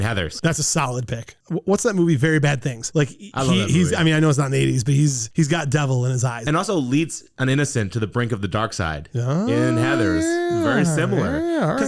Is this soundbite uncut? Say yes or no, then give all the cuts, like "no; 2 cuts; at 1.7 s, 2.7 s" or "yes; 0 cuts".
no; 2 cuts; at 1.3 s, 6.3 s